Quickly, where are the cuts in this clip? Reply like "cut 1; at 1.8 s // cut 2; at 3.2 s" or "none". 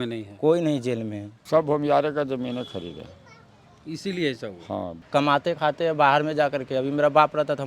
cut 1; at 1.3 s // cut 2; at 5.0 s